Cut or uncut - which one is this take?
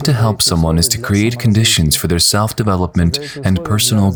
uncut